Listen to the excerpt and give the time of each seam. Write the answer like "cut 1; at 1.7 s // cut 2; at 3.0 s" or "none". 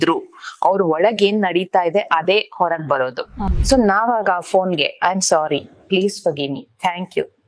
cut 1; at 3.4 s